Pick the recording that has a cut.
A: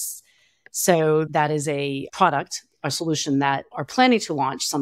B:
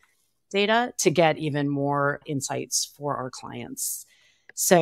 A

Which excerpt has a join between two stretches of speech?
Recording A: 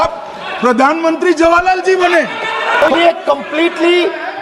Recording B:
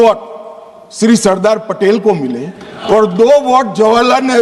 A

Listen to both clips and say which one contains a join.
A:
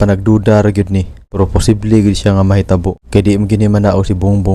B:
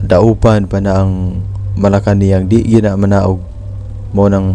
A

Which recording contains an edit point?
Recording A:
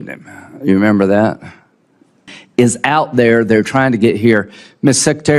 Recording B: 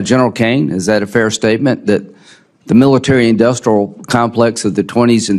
A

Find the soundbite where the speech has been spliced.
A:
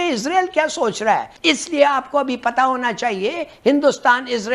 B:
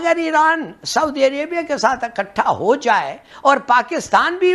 A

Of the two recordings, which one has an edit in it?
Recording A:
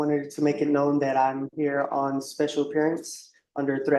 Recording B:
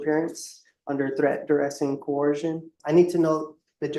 B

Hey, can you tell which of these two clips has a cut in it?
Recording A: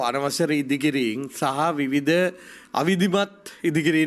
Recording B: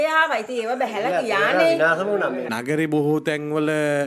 B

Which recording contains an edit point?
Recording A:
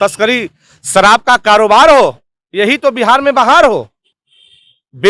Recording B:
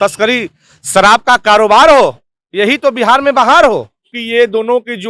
B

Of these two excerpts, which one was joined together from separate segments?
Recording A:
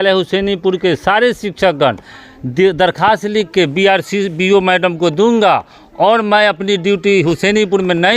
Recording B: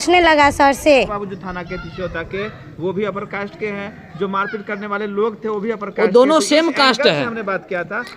B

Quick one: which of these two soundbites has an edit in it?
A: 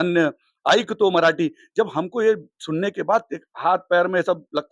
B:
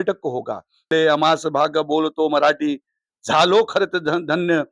B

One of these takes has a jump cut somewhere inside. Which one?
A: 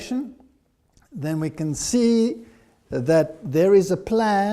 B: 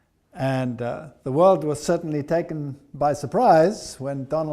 A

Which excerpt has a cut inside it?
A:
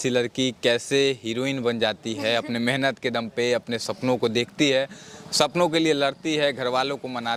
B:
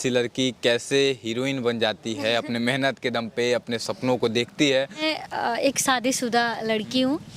B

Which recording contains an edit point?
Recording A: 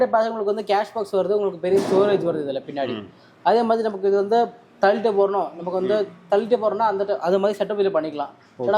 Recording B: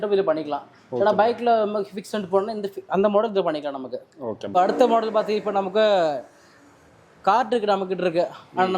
B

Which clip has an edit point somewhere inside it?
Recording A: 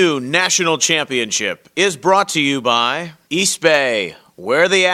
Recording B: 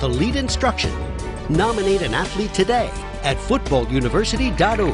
A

